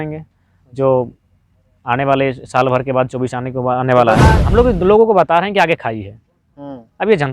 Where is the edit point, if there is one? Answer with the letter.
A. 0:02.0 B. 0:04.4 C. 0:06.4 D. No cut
B